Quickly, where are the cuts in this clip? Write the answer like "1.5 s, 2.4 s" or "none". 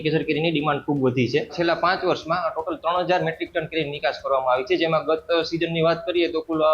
1.5 s